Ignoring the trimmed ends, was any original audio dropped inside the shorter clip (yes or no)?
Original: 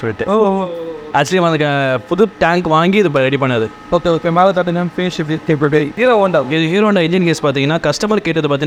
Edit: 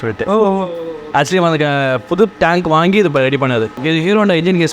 yes